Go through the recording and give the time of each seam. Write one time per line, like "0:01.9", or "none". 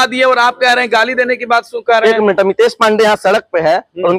none